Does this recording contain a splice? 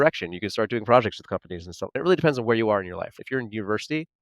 yes; 2 cuts; at 2.0 s, 3.2 s

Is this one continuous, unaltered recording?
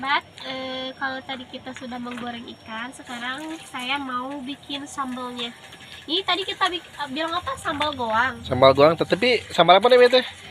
yes; 0 cuts

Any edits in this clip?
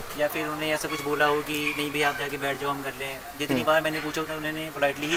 no; 0 cuts

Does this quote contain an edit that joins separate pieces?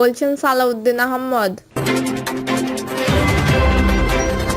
yes; 1 cut; at 1.7 s

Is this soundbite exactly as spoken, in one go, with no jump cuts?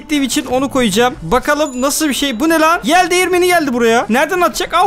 yes; 0 cuts

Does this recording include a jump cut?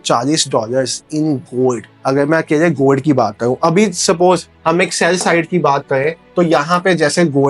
no; 0 cuts

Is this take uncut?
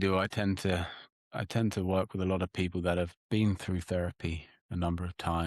yes; 0 cuts

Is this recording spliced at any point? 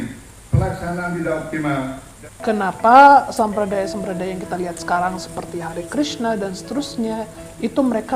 yes; 1 cut; at 2.1 s

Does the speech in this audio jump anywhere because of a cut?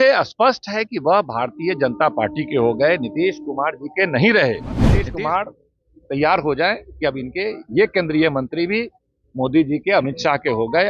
yes; 1 cut; at 5.1 s

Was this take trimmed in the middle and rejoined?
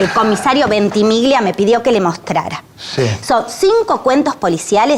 no; 0 cuts

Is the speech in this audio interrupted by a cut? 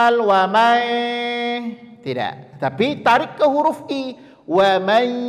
no; 0 cuts

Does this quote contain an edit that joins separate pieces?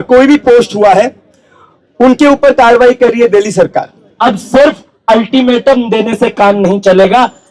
yes; 1 cut; at 4.0 s

